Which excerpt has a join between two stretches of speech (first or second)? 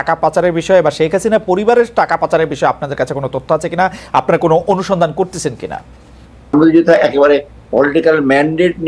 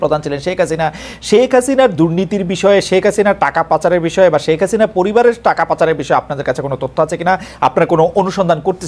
first